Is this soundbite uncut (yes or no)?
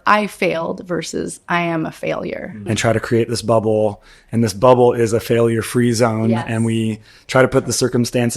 no